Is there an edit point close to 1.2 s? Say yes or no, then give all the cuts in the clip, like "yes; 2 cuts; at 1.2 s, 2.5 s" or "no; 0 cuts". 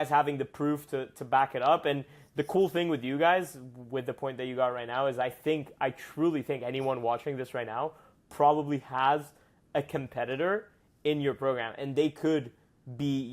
no; 0 cuts